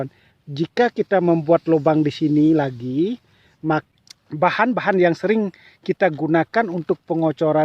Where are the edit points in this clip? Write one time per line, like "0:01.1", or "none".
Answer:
0:03.9